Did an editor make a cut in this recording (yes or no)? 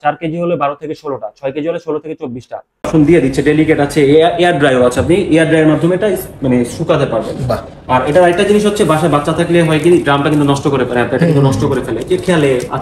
yes